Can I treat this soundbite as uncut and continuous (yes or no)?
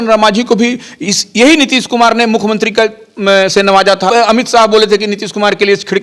no